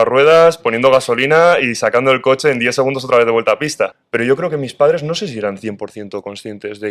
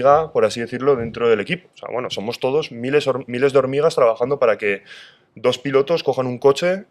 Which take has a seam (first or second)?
first